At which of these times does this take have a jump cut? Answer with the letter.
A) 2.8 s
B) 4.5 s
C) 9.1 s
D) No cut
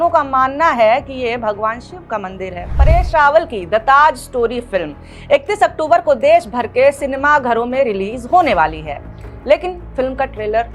A